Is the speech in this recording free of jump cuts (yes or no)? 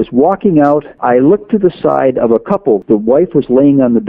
no